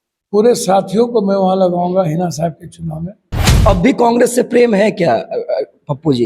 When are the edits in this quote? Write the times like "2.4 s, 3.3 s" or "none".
3.5 s